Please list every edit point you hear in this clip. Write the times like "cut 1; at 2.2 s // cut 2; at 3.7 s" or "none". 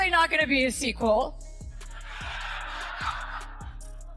none

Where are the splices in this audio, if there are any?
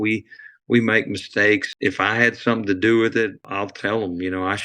cut 1; at 1.7 s // cut 2; at 3.4 s

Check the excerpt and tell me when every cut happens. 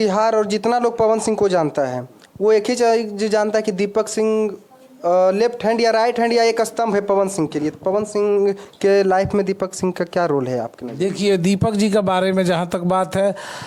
none

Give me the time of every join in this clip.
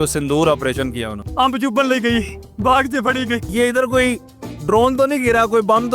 cut 1; at 1.1 s // cut 2; at 2.4 s // cut 3; at 3.5 s

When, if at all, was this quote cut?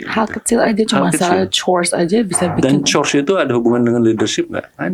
none

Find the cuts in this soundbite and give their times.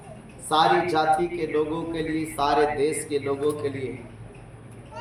none

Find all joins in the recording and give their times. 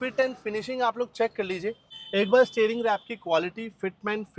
cut 1; at 1.9 s

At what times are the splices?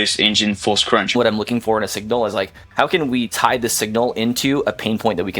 cut 1; at 1.1 s // cut 2; at 2.6 s

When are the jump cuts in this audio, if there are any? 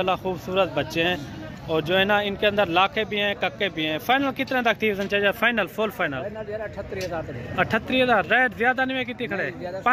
none

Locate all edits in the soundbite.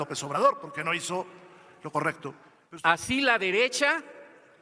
cut 1; at 2.5 s

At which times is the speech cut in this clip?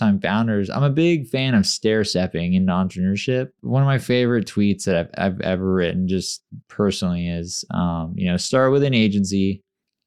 cut 1; at 3.5 s

